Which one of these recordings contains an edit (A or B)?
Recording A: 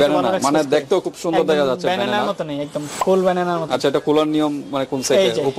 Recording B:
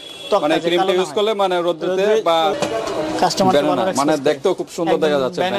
B